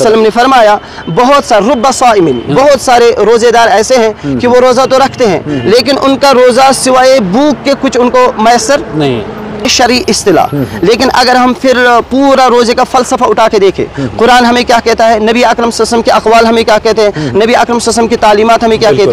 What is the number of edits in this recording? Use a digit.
1